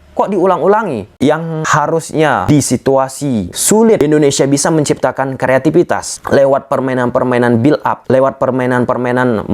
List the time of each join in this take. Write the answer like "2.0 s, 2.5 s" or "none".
1.1 s, 2.5 s, 4.0 s, 8.0 s